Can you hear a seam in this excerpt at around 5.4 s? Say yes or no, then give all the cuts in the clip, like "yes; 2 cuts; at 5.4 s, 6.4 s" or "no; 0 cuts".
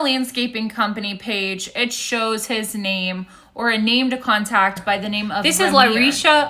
yes; 1 cut; at 5.4 s